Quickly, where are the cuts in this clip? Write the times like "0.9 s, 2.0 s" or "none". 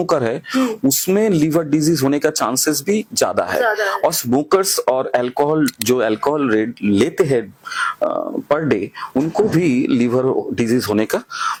none